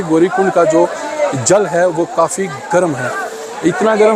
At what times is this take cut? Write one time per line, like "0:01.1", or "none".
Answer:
none

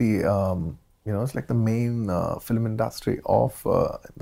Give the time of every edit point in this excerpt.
none

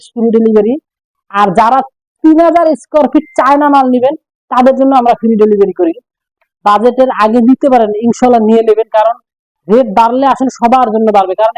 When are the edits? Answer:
0:06.1

